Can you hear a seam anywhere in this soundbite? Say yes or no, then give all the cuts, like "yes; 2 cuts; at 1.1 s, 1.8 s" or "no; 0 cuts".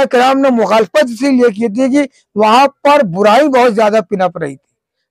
no; 0 cuts